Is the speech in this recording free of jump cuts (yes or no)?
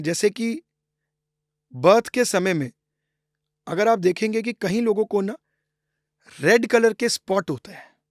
yes